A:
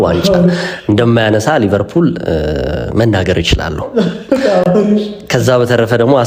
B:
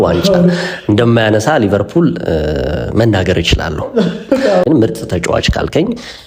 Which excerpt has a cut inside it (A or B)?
B